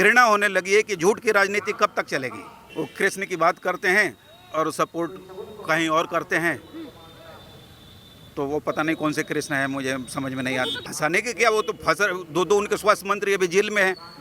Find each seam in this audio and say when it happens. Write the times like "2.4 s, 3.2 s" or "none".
2.6 s, 10.8 s